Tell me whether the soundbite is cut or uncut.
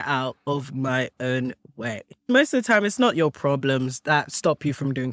cut